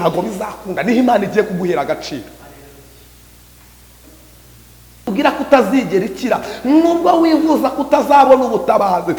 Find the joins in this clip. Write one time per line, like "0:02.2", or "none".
0:05.1